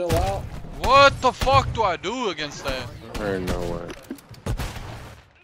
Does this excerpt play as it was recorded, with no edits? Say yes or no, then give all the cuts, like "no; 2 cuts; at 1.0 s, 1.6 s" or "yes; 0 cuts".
yes; 0 cuts